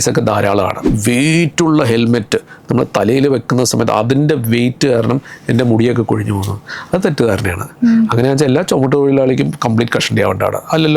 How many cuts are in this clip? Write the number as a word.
one